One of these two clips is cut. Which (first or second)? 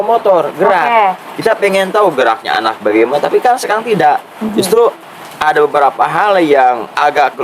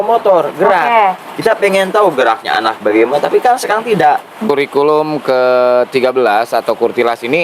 second